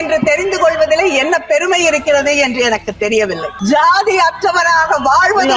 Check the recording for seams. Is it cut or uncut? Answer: cut